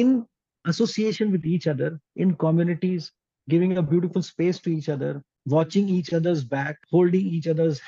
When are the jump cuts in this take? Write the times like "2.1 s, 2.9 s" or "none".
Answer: 5.3 s, 6.8 s